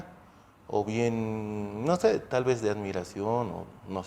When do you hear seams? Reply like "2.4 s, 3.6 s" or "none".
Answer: none

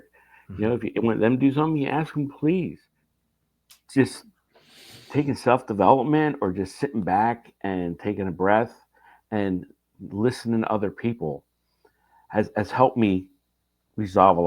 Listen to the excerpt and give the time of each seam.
2.8 s

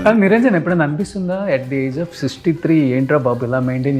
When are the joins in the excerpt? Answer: none

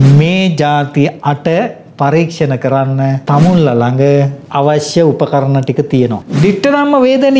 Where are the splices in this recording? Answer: 3.2 s, 4.4 s, 6.3 s

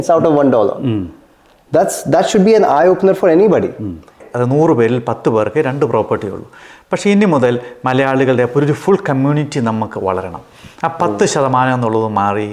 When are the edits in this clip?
4.3 s

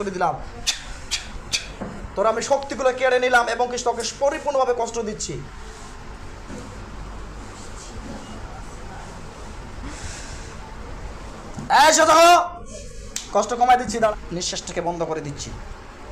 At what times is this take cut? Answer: 14.1 s

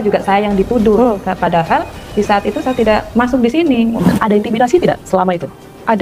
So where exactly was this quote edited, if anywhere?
3.5 s, 4.0 s

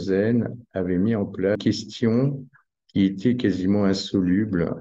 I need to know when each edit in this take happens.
1.6 s

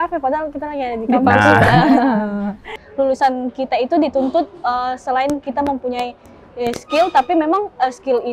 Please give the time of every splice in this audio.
2.8 s

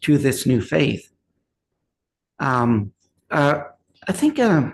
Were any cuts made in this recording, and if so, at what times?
none

